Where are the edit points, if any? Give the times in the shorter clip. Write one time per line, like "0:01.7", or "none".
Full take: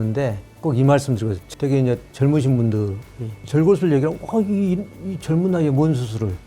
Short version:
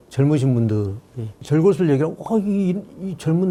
none